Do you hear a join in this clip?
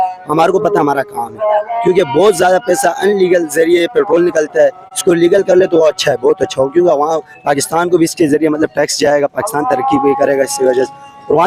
no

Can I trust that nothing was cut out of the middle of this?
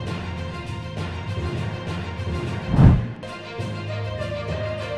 no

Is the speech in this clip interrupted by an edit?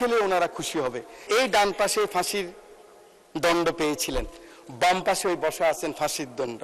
yes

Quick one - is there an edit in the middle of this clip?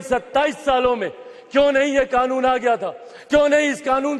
no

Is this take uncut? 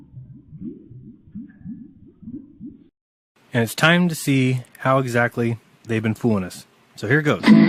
no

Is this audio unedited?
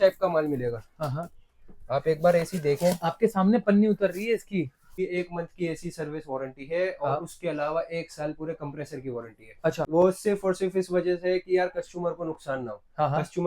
no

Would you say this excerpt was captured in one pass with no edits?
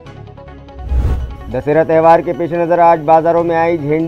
no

